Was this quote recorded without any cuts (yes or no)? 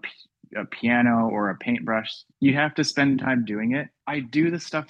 no